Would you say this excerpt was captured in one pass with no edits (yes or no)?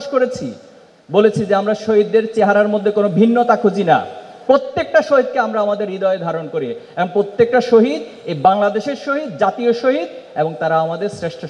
yes